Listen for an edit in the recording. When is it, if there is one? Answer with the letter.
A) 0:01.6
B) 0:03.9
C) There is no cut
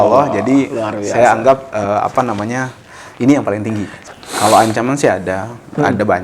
B